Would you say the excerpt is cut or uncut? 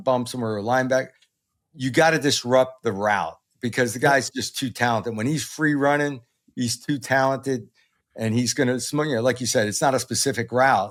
uncut